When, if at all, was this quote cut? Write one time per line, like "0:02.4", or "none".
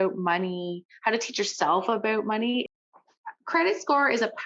0:02.6